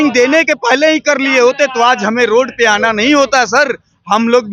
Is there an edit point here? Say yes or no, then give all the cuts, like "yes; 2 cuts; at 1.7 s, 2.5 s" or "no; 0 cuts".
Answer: no; 0 cuts